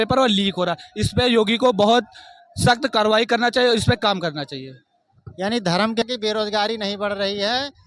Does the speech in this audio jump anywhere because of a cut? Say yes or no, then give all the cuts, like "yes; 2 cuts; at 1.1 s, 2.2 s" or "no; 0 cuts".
yes; 1 cut; at 6.0 s